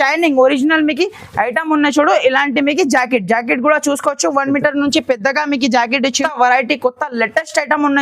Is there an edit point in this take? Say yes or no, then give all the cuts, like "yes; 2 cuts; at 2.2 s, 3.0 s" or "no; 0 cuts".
yes; 1 cut; at 6.2 s